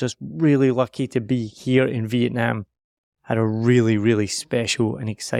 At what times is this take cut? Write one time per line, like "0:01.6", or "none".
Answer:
none